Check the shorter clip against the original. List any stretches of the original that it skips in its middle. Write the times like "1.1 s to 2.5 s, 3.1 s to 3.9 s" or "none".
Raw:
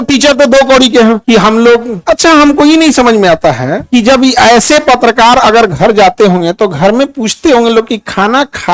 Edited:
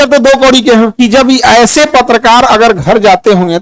1.2 s to 3.8 s